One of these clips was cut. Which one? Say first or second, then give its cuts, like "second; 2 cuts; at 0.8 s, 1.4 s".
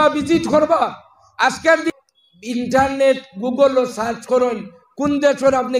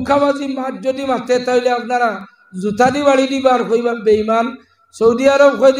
first; 1 cut; at 1.9 s